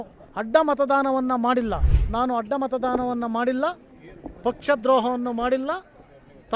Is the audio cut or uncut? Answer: cut